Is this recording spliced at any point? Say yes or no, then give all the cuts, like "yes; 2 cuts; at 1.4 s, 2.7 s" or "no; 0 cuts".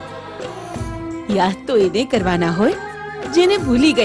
no; 0 cuts